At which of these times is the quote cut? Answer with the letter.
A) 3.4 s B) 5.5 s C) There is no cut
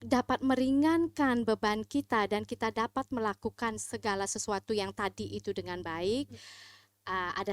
C